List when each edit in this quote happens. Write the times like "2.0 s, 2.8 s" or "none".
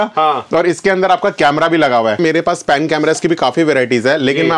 2.2 s